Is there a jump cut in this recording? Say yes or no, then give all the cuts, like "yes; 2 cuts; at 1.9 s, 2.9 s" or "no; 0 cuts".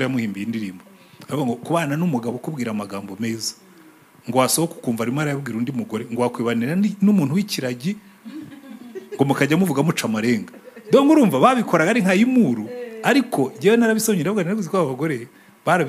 no; 0 cuts